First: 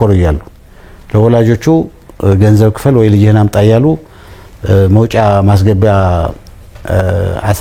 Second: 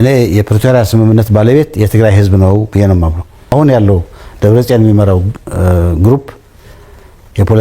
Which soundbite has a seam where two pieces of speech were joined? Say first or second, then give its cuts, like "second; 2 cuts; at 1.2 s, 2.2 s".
second; 1 cut; at 3.3 s